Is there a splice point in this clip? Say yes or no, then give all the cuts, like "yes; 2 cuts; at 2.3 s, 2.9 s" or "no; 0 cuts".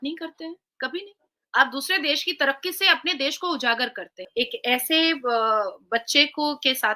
yes; 1 cut; at 4.2 s